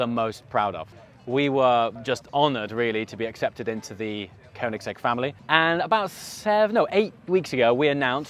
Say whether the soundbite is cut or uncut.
cut